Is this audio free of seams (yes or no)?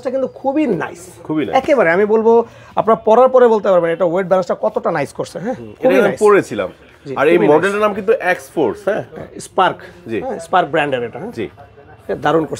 yes